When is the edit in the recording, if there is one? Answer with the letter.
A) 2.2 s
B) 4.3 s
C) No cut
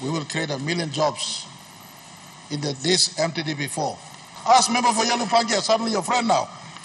B